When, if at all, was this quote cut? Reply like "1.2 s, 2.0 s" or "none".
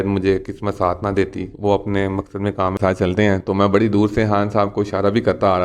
2.7 s